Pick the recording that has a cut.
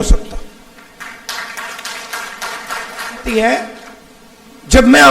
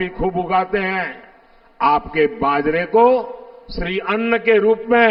first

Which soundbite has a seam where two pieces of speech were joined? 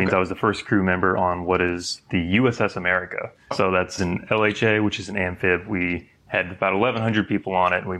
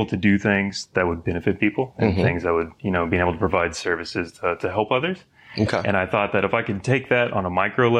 first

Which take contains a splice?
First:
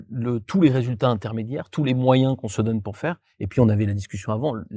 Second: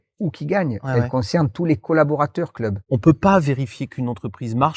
second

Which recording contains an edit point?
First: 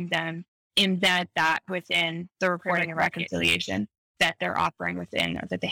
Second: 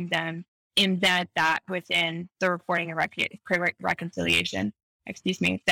first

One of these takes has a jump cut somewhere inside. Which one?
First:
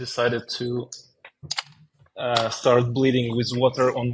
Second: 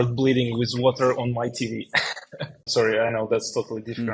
second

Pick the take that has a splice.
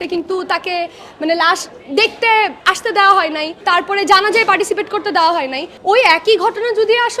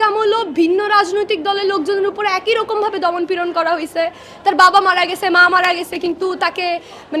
first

